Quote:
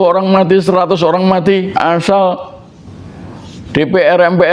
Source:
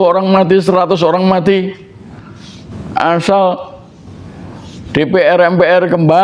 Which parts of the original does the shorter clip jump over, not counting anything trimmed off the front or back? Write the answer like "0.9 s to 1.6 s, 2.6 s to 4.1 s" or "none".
1.7 s to 2.9 s